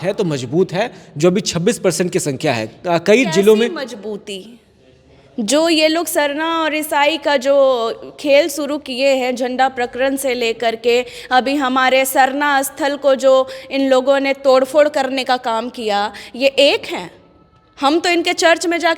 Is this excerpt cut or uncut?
uncut